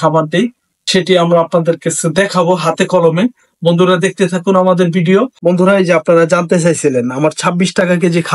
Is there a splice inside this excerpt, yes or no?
yes